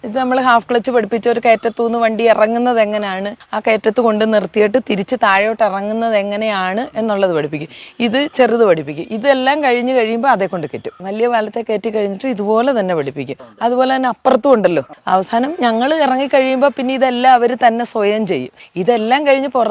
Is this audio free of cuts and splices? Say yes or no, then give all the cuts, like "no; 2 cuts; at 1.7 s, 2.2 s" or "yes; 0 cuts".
yes; 0 cuts